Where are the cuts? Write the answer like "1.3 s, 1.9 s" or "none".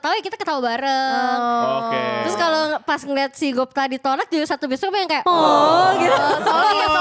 none